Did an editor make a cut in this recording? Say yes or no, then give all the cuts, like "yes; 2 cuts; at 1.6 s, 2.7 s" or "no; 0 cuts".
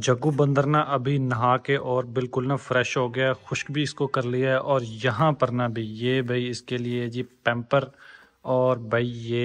no; 0 cuts